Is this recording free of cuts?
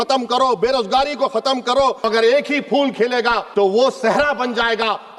no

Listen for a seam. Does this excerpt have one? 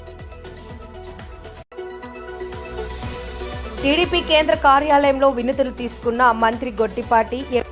no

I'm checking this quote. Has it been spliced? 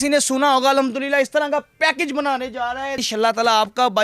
yes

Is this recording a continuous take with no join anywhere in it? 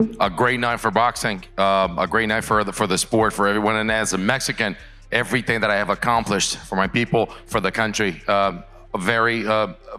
yes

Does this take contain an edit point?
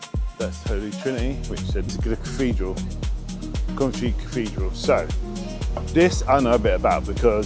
yes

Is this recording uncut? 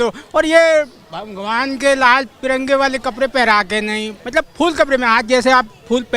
no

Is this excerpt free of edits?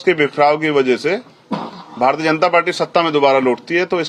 yes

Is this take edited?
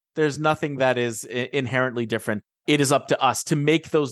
no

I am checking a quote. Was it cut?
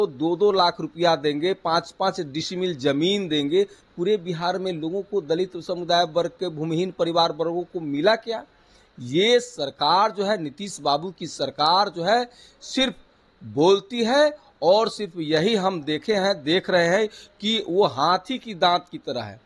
no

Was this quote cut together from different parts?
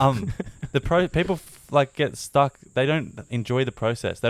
no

